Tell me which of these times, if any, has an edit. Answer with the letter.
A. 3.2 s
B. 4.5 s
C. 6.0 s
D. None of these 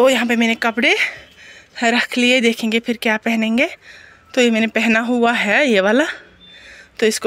D